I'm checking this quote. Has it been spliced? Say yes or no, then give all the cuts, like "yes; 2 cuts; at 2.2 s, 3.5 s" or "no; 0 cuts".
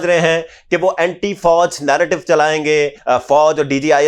yes; 1 cut; at 3.0 s